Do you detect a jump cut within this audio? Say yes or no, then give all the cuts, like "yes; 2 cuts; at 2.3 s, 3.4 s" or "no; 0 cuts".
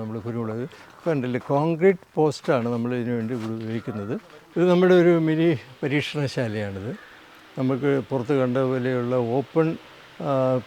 yes; 1 cut; at 4.4 s